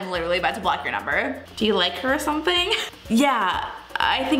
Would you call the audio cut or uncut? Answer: cut